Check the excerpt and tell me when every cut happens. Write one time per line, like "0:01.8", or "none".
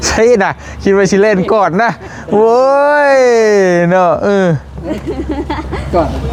none